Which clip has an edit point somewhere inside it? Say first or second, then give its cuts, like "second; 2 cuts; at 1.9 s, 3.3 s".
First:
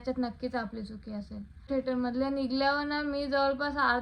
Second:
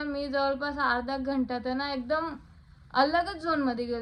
first; 1 cut; at 1.7 s